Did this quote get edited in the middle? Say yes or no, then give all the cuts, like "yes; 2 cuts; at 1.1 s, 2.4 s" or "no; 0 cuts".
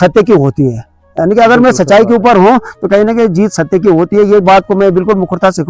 no; 0 cuts